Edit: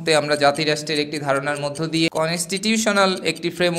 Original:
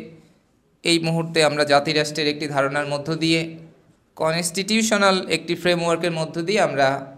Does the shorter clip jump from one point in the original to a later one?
yes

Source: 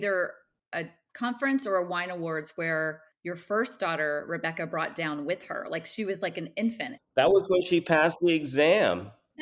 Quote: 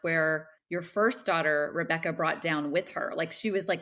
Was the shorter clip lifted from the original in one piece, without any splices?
yes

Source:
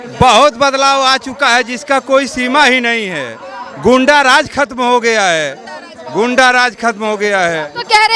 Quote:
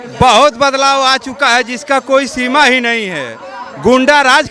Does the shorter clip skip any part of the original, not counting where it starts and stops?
no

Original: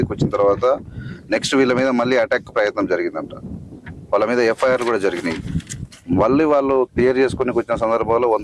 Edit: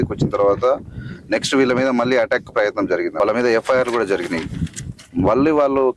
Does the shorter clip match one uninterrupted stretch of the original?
no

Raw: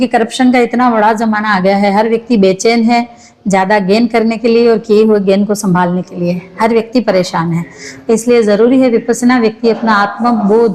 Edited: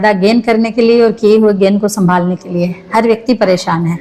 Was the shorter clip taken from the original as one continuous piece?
yes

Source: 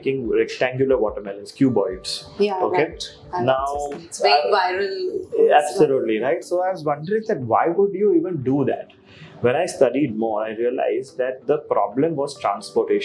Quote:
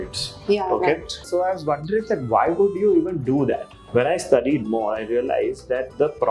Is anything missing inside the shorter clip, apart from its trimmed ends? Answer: yes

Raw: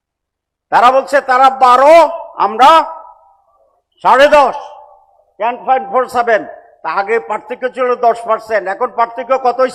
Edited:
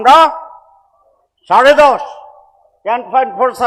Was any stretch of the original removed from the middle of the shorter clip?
no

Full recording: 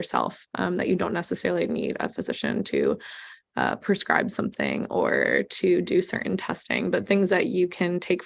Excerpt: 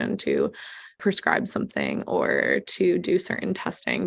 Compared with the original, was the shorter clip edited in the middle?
yes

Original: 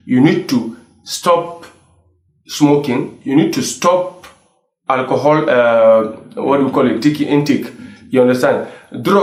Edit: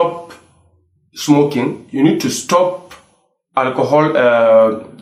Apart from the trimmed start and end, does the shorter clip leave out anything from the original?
no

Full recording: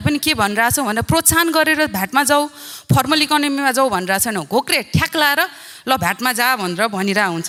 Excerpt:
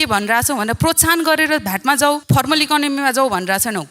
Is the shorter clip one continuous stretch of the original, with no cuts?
no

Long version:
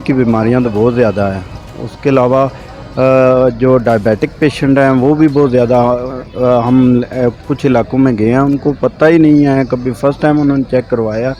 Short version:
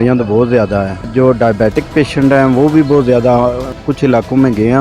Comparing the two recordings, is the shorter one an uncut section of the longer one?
no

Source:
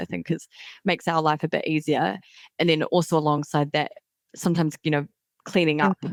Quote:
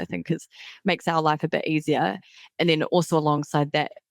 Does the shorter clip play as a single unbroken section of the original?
yes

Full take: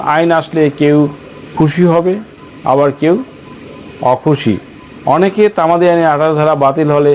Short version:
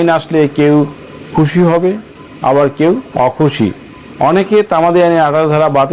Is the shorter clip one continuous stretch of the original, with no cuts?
no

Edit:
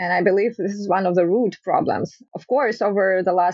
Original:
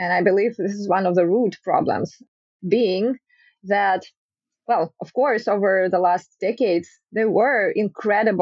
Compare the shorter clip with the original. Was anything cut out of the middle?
yes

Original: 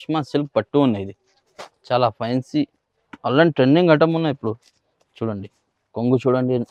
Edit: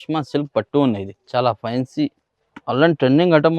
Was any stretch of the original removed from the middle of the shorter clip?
yes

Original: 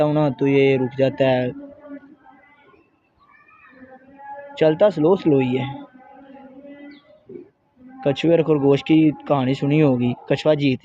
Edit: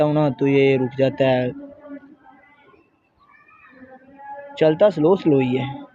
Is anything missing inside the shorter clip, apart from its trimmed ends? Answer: no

